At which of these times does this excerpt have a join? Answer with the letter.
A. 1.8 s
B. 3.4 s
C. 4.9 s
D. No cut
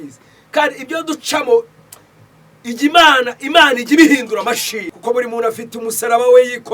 C